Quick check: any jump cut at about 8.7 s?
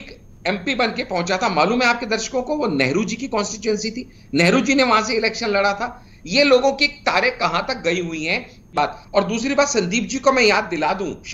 yes; 1 cut; at 8.7 s

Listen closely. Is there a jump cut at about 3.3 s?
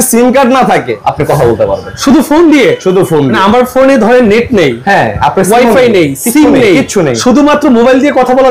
yes; 3 cuts; at 0.9 s, 1.9 s, 3.3 s

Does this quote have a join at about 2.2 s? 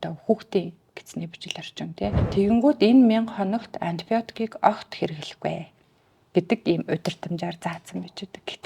yes; 1 cut; at 2.2 s

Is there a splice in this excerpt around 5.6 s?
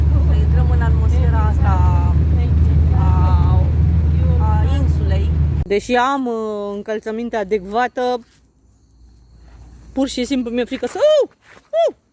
yes; 1 cut; at 5.6 s

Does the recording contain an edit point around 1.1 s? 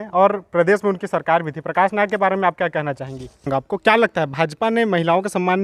no; 1 cut; at 3.5 s

